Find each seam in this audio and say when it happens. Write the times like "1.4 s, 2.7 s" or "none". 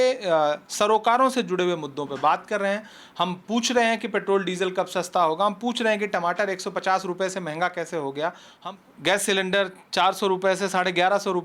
8.5 s